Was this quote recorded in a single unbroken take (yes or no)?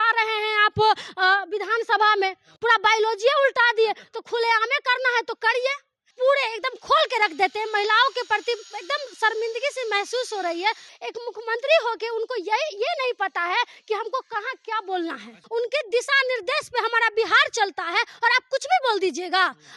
no